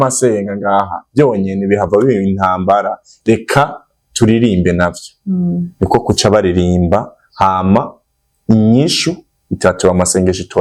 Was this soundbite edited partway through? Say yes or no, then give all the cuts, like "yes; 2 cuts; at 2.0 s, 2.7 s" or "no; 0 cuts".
no; 0 cuts